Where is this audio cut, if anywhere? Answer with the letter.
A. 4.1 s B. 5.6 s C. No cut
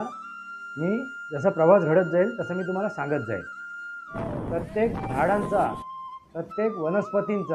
A